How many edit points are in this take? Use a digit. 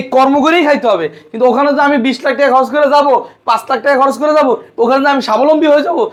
0